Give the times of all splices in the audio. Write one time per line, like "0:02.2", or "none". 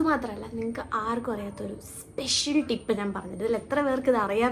none